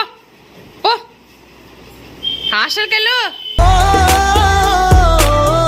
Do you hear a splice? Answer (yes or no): no